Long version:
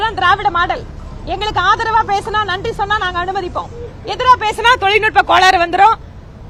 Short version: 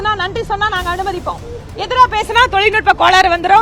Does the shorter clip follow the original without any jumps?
yes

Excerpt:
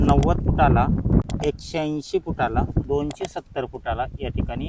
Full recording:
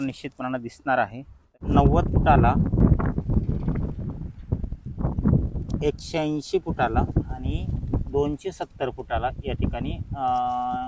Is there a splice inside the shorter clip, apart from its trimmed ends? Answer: yes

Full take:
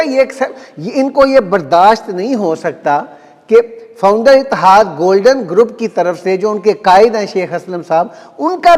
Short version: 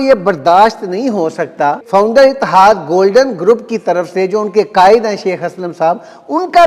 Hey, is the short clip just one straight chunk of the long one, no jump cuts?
no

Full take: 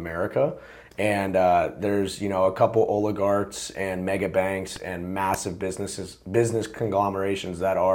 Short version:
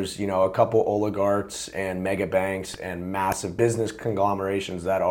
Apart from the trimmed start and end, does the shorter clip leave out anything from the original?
yes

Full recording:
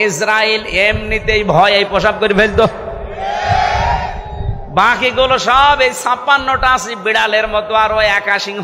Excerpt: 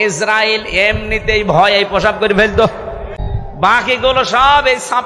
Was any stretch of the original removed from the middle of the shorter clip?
yes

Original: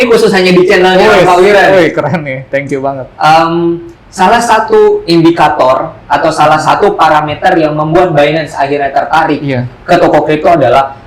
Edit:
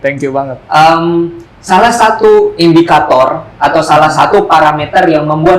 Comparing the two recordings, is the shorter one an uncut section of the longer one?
yes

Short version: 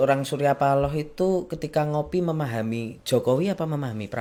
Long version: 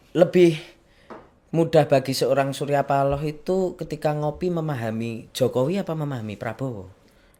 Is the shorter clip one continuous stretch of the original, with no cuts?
yes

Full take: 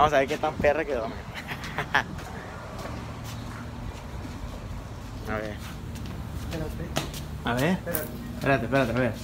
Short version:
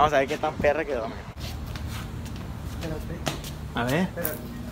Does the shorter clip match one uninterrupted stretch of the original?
no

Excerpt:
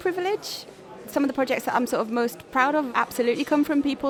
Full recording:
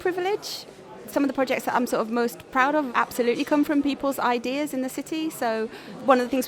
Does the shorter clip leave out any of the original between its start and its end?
no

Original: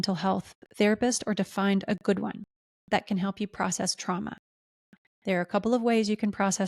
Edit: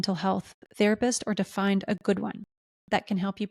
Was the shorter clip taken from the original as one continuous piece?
yes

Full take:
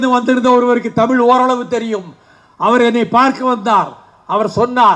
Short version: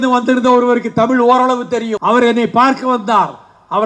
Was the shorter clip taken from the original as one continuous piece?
no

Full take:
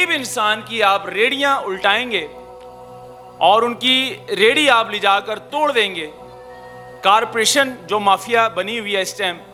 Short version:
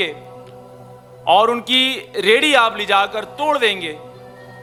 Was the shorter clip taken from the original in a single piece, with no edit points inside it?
yes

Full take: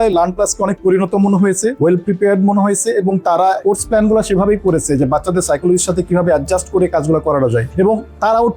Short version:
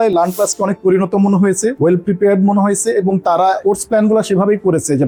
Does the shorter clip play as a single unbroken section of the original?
yes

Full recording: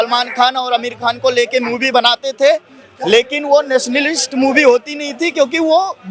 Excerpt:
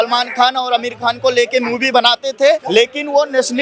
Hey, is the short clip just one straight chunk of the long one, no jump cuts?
no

